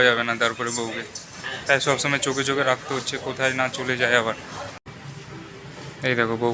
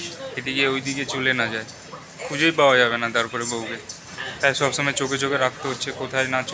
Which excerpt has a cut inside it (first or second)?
first